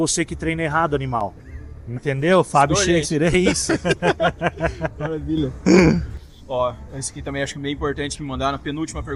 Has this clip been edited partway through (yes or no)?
no